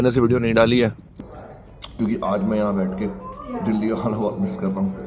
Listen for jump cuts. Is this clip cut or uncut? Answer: cut